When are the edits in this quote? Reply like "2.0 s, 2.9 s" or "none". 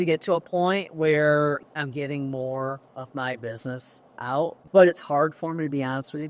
1.6 s, 2.9 s, 4.6 s